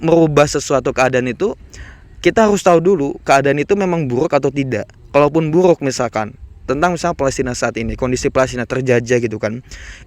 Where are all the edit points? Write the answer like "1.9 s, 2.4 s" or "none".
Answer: none

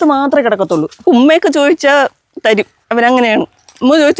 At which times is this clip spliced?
0.9 s, 2.8 s

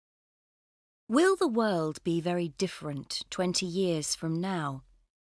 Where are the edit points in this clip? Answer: 1.5 s

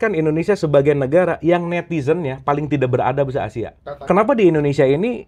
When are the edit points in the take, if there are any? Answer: 4.1 s

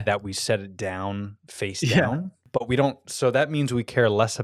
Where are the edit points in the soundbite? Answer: 2.4 s

